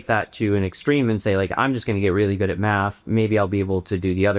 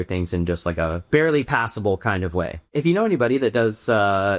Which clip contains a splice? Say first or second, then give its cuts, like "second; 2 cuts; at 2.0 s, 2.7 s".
second; 2 cuts; at 1.0 s, 2.7 s